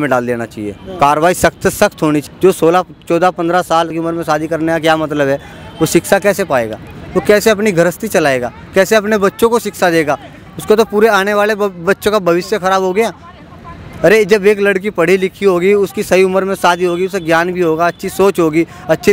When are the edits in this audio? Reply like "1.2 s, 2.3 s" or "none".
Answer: 2.2 s, 3.9 s